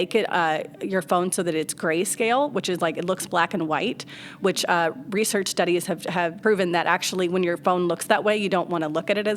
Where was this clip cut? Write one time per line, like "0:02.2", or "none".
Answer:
0:06.3